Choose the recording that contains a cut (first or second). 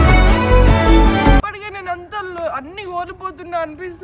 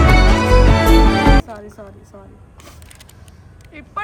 first